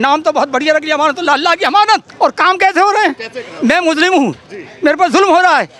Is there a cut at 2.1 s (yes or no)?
yes